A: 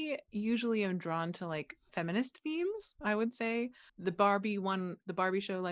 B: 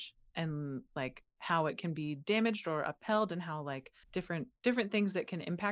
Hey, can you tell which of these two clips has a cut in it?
A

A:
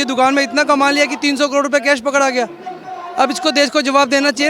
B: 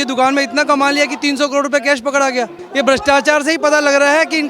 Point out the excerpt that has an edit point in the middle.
B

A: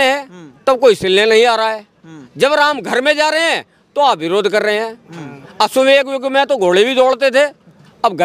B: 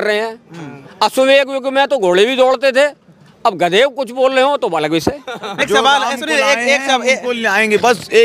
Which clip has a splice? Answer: B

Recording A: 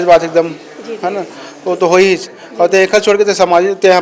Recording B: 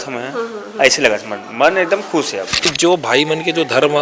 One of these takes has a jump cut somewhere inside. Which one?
B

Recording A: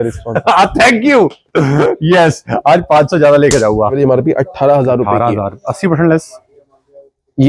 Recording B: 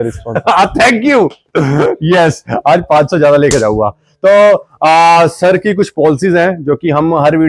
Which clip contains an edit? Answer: A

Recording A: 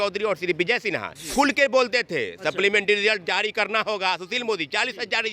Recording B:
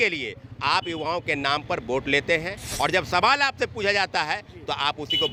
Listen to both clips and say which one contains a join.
A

